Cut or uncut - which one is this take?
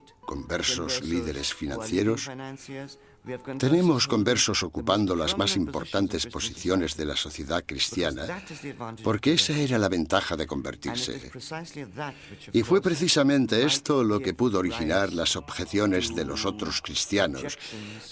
cut